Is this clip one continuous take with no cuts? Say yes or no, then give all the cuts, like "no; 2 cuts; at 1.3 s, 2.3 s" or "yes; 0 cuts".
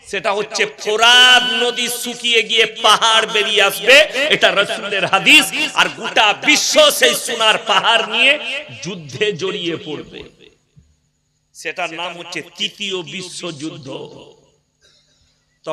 yes; 0 cuts